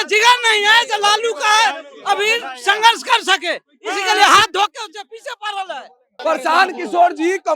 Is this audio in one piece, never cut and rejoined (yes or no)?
no